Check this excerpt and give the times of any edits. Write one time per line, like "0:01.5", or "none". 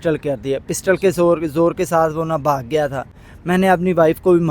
none